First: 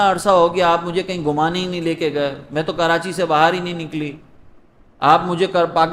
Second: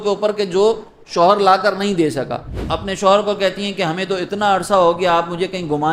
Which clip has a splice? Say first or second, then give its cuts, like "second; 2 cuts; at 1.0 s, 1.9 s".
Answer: second; 1 cut; at 2.4 s